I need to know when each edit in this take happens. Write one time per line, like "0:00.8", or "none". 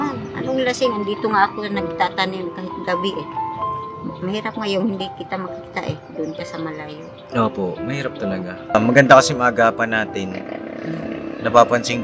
0:08.7